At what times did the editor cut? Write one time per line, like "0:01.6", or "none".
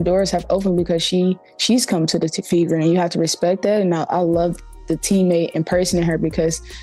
0:03.9